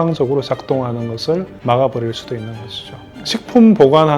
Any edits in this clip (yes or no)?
yes